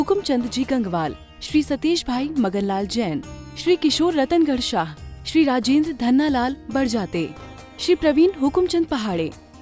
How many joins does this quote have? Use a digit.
0